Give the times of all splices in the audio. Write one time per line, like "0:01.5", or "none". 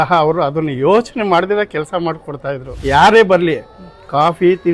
0:02.7